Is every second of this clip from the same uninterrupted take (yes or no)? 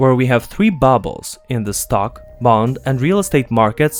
yes